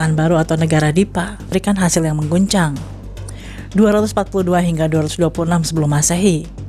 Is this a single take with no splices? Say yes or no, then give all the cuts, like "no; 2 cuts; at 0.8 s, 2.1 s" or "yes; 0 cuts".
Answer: no; 1 cut; at 1.5 s